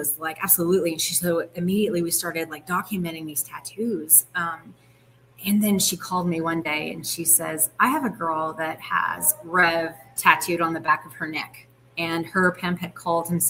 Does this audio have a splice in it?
no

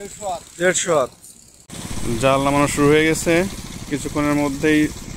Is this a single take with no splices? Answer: no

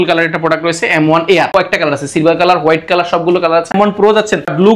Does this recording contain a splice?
yes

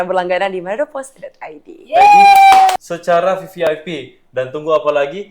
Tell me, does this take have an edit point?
yes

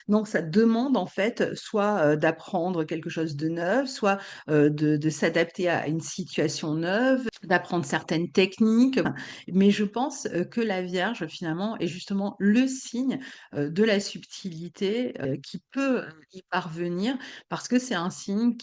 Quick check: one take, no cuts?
no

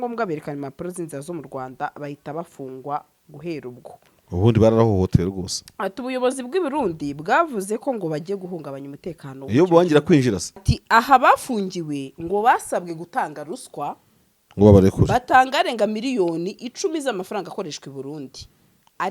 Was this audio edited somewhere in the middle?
yes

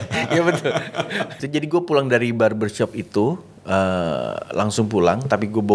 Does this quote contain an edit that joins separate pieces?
yes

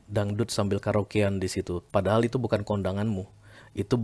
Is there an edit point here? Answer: no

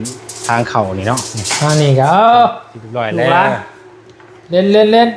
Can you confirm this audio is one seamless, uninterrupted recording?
yes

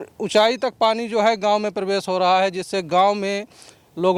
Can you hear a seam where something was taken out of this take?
no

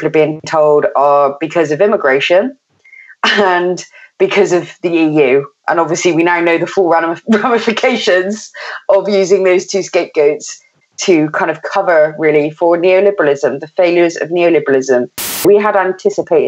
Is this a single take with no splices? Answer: no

